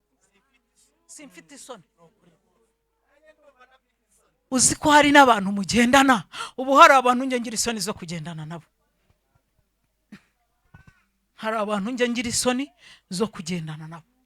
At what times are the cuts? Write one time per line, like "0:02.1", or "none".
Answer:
0:04.3

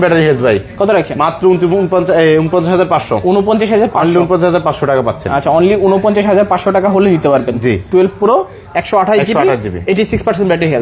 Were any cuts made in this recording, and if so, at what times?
none

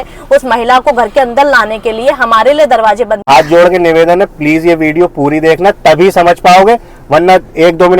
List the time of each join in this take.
0:03.3

